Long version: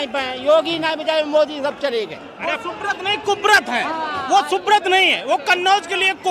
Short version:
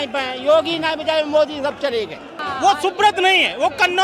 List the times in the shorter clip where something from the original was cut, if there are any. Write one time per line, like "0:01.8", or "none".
0:02.4